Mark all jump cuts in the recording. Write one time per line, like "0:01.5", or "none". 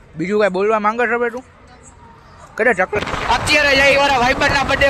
0:03.0